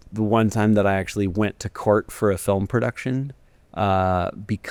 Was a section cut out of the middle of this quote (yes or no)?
no